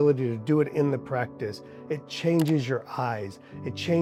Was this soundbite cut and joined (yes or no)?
no